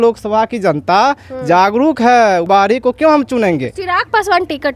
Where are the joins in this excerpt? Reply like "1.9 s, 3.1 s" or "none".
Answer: 2.5 s